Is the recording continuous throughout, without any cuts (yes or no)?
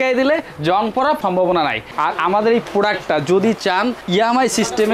no